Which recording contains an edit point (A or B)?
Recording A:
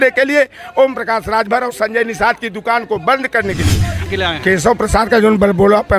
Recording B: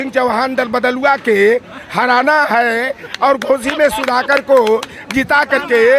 A